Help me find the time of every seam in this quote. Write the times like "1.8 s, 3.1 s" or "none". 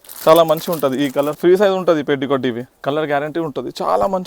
1.3 s, 2.7 s